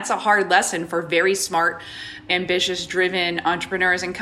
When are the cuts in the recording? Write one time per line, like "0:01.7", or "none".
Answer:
0:02.2